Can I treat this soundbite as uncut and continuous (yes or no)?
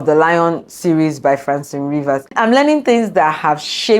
no